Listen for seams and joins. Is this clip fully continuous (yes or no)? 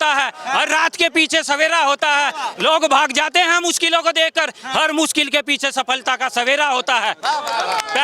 yes